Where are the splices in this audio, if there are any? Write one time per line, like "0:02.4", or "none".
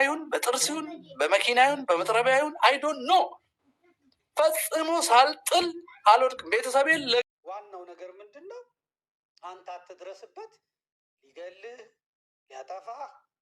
0:07.2